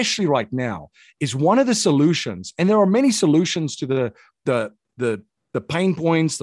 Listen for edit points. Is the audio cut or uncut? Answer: uncut